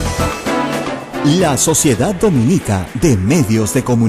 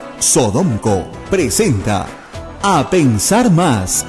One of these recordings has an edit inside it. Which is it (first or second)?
first